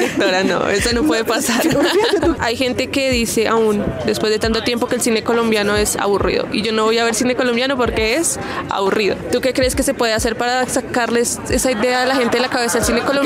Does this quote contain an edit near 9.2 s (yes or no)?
yes